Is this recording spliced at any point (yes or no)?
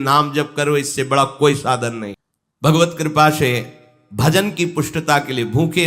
yes